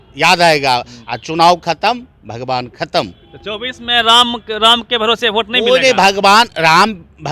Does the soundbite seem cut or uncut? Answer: uncut